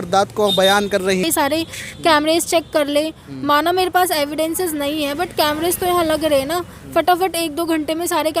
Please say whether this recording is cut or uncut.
cut